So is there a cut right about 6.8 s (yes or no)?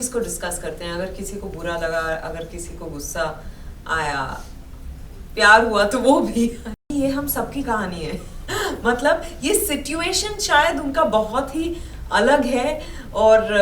yes